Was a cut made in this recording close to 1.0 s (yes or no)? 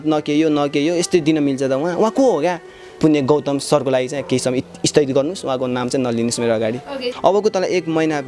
no